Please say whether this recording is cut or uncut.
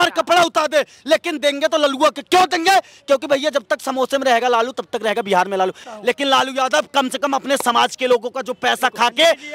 cut